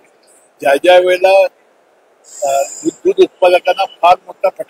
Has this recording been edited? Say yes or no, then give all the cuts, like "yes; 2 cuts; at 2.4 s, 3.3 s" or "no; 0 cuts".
no; 0 cuts